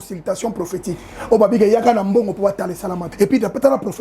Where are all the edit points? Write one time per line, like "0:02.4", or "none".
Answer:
0:03.0